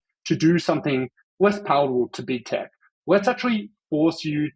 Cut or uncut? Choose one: cut